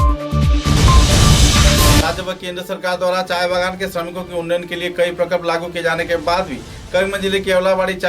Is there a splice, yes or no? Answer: yes